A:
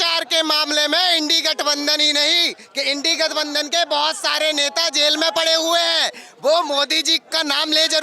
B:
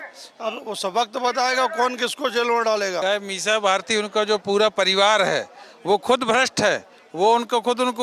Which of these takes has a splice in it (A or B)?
B